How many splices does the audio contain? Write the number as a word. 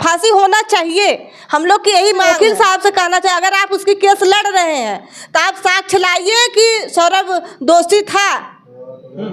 one